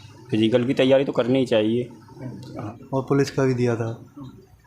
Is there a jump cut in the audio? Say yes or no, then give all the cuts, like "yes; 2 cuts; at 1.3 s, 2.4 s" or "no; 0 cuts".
yes; 1 cut; at 2.7 s